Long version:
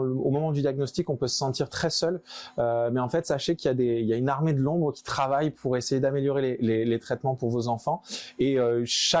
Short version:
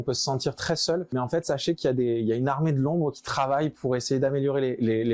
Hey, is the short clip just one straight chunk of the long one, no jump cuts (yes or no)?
no